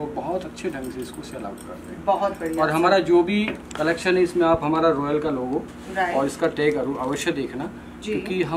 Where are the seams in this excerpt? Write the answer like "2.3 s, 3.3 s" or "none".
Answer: none